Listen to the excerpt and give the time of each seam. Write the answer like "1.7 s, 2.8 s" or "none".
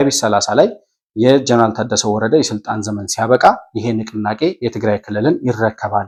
none